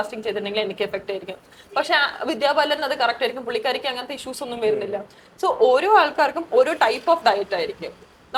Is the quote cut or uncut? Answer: uncut